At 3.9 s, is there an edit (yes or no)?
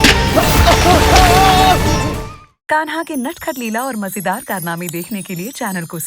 no